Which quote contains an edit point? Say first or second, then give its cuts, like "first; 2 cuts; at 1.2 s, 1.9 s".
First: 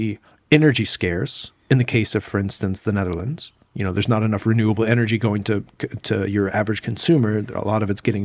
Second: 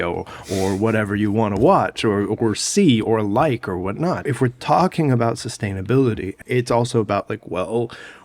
second; 2 cuts; at 4.3 s, 6.4 s